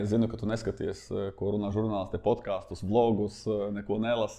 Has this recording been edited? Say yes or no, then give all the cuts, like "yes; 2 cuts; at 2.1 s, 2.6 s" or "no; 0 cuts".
no; 0 cuts